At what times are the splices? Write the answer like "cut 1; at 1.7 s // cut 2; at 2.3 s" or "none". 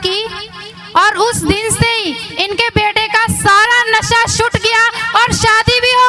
none

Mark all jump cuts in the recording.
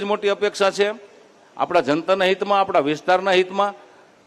none

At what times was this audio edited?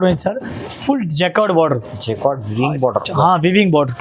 none

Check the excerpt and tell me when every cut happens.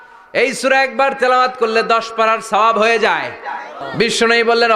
cut 1; at 3.8 s

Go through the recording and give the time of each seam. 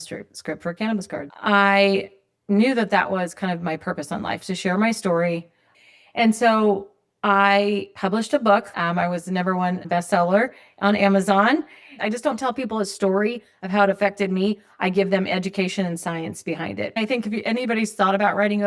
cut 1; at 1.2 s // cut 2; at 7.9 s // cut 3; at 9.8 s // cut 4; at 11.9 s // cut 5; at 17.0 s

